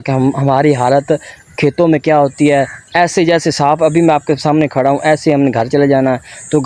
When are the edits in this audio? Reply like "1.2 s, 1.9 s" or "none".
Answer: none